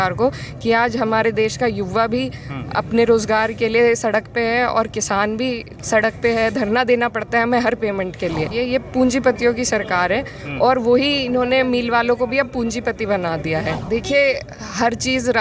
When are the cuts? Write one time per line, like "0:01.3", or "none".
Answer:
0:08.5
0:13.8